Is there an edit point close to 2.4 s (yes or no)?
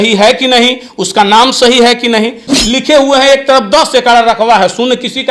yes